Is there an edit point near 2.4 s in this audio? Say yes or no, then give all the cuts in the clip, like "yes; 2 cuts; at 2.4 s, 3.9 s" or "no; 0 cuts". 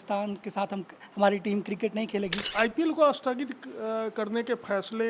yes; 1 cut; at 2.4 s